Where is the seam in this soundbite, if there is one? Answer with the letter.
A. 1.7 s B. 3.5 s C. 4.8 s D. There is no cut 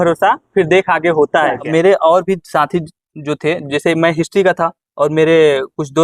A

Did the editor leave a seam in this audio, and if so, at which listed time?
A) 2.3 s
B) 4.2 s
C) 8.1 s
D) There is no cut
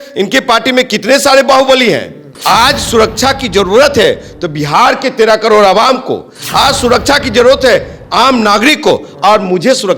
A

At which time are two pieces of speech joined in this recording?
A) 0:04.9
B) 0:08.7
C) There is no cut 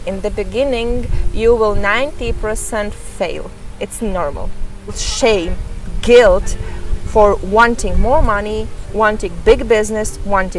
A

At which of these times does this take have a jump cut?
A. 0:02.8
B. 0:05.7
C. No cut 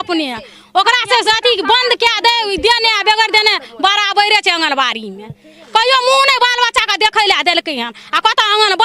C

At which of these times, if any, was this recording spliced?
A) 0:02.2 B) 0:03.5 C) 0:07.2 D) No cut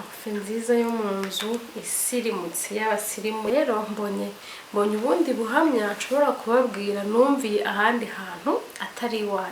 B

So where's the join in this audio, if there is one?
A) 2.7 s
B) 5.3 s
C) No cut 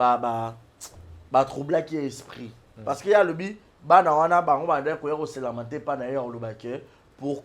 A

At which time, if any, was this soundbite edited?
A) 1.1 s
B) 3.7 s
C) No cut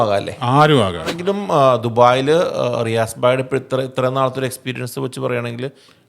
A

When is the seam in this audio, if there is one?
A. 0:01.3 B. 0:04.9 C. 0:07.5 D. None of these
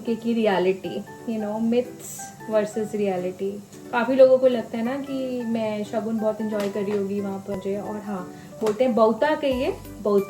C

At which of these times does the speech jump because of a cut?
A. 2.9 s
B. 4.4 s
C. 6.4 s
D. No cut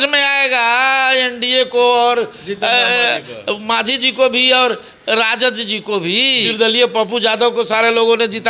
C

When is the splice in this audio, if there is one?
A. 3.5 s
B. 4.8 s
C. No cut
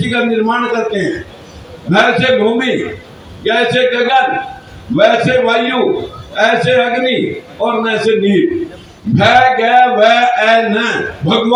C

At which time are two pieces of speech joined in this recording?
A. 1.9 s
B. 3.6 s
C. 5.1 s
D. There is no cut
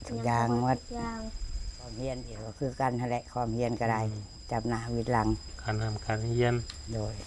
A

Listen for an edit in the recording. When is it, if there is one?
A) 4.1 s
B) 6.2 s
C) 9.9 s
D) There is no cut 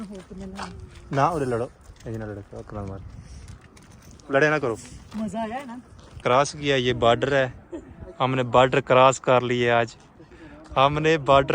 B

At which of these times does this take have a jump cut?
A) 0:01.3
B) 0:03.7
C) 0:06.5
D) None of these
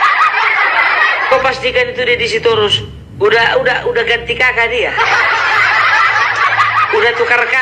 A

